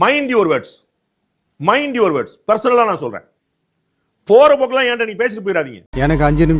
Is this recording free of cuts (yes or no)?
yes